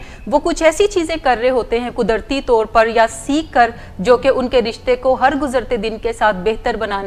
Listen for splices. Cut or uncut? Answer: uncut